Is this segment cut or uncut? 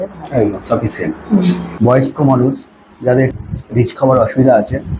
cut